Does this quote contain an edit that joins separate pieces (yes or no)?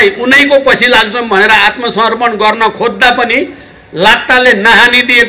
no